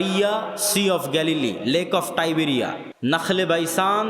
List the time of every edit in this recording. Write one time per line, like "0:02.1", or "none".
0:02.8